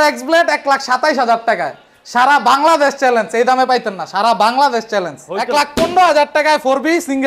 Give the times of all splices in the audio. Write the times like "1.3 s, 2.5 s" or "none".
5.3 s